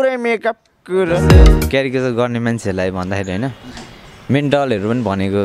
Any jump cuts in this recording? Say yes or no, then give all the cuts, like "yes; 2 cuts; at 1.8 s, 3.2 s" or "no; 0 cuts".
yes; 1 cut; at 1.2 s